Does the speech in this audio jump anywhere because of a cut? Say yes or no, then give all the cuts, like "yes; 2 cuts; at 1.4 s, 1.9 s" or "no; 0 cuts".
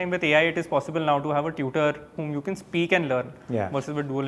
no; 0 cuts